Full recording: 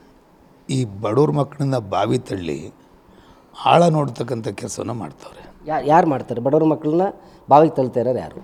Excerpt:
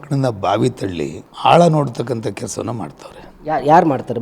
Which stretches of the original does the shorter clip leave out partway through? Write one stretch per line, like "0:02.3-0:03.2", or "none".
0:02.7-0:03.4